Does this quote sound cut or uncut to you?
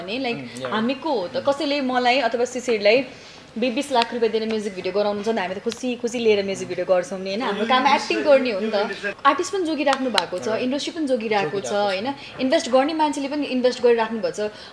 cut